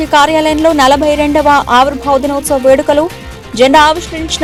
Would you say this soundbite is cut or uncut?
uncut